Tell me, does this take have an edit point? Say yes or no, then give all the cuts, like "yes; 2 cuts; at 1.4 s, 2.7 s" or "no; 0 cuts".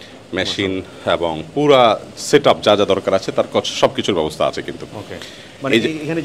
no; 0 cuts